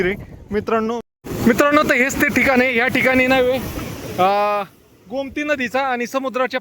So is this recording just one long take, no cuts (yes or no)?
no